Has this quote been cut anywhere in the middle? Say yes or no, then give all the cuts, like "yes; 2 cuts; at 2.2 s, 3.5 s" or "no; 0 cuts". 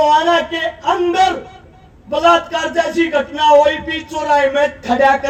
no; 0 cuts